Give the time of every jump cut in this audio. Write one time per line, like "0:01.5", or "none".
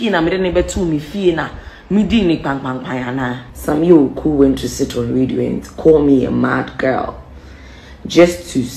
0:03.5